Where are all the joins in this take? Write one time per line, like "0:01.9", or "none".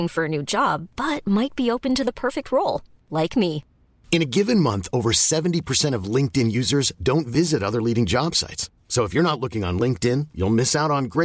none